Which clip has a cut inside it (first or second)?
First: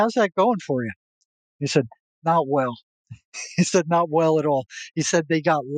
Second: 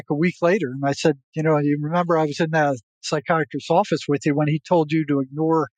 second